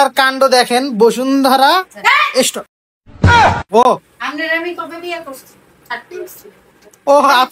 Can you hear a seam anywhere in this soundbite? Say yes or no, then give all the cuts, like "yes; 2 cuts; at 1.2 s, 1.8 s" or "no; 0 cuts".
no; 0 cuts